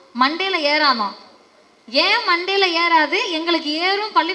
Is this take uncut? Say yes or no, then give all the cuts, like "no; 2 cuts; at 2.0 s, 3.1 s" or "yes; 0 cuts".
yes; 0 cuts